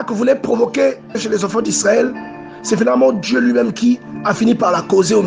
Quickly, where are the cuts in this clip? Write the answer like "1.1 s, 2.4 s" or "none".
none